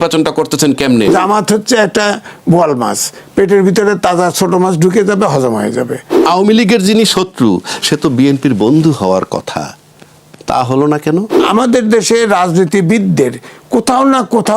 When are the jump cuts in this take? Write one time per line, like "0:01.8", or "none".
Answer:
0:01.1
0:06.1
0:11.4